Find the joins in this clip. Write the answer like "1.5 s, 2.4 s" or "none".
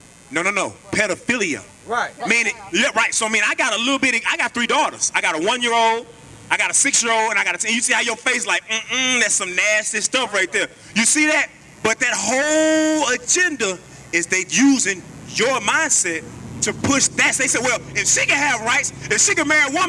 none